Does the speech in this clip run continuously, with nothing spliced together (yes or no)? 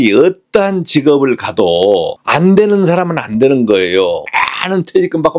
no